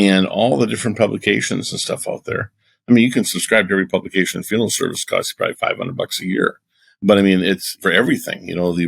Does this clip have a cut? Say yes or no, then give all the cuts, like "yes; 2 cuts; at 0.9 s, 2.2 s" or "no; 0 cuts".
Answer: yes; 1 cut; at 7.7 s